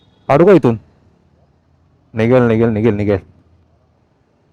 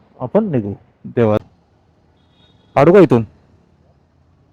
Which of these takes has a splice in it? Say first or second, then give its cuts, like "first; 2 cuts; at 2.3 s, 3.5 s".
second; 1 cut; at 1.4 s